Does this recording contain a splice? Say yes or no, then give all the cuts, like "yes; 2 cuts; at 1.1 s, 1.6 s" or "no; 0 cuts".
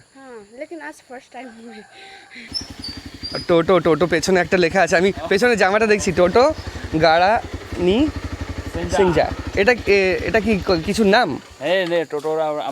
yes; 1 cut; at 2.5 s